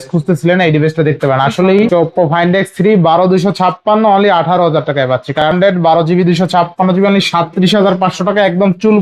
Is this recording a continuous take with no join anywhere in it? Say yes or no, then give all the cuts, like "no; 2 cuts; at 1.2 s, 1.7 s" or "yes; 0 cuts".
no; 2 cuts; at 1.8 s, 5.5 s